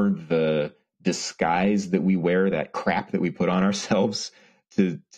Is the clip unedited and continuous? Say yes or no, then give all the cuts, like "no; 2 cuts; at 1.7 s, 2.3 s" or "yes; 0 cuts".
yes; 0 cuts